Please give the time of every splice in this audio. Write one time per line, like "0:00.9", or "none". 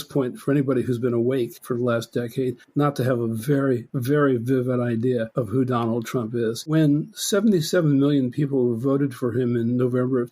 0:03.9
0:05.3
0:06.7

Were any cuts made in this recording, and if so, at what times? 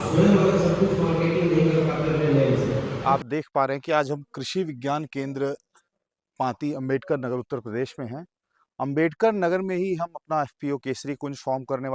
0:02.9

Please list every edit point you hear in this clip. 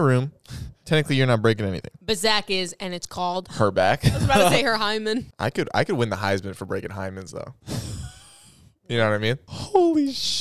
0:05.3
0:09.5

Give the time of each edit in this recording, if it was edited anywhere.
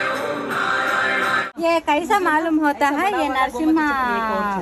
0:01.6

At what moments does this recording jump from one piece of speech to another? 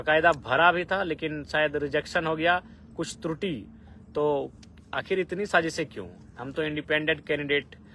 none

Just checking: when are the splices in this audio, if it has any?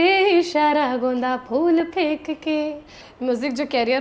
0:03.0

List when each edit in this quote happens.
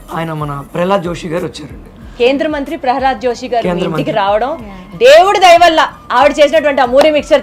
none

